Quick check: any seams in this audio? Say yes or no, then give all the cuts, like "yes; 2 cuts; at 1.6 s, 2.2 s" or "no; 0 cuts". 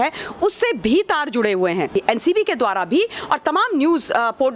yes; 1 cut; at 1.9 s